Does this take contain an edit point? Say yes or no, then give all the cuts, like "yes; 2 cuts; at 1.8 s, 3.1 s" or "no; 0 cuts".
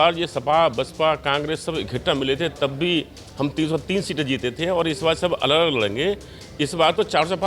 no; 0 cuts